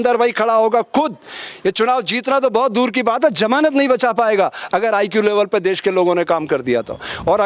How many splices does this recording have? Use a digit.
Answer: 0